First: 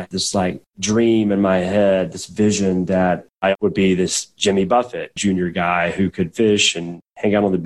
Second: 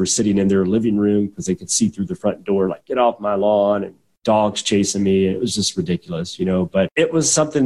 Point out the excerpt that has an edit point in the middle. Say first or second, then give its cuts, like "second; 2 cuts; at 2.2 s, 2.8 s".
first; 1 cut; at 3.3 s